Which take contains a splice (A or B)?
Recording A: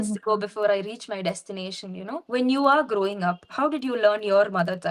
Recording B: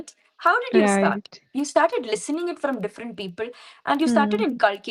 A